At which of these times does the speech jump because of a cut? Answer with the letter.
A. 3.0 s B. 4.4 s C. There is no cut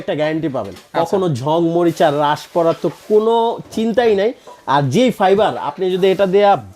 C